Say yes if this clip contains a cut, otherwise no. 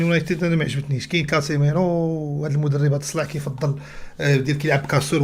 no